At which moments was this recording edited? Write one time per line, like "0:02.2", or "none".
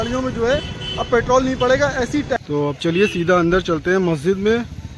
0:02.4